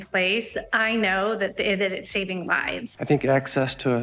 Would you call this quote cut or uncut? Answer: cut